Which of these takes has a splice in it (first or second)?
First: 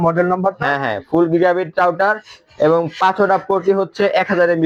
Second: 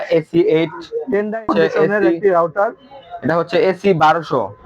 second